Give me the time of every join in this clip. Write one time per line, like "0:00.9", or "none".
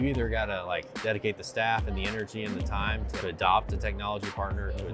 0:00.9
0:03.1